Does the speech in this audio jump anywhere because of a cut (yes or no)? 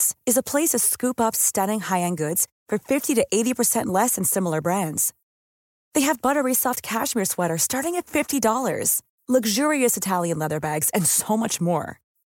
no